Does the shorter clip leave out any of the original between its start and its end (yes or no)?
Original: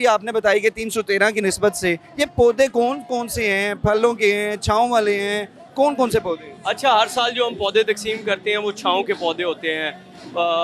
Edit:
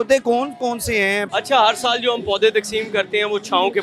yes